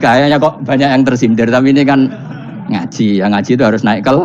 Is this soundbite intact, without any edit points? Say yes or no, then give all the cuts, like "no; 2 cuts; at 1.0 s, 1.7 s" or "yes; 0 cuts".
yes; 0 cuts